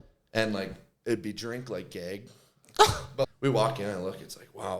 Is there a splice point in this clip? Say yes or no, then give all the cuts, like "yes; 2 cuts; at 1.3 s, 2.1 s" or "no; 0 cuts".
yes; 1 cut; at 3.3 s